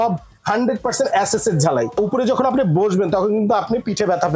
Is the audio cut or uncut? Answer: cut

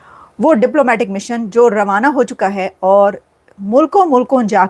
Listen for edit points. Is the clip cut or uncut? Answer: uncut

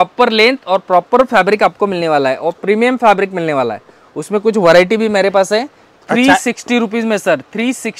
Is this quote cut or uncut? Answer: uncut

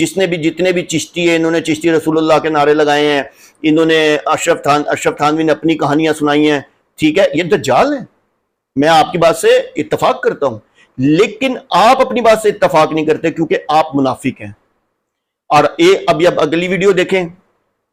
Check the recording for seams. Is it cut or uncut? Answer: uncut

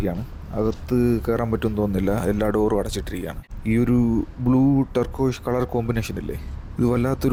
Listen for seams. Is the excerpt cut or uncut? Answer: uncut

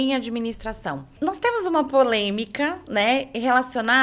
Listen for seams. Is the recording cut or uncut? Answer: cut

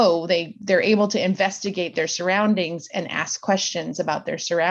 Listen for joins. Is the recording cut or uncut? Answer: uncut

